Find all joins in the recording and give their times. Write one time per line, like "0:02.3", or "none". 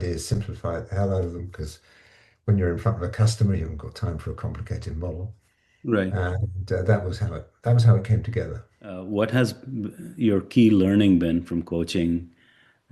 0:09.0